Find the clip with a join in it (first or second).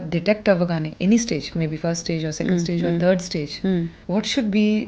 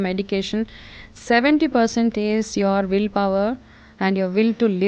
first